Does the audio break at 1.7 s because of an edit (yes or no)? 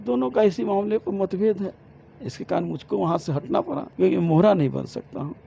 no